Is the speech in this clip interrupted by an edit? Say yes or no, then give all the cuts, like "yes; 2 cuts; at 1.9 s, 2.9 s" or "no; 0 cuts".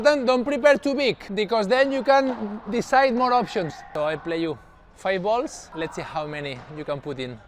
yes; 3 cuts; at 1.2 s, 3.8 s, 5.6 s